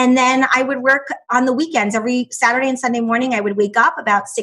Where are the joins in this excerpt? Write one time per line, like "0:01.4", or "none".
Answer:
0:01.3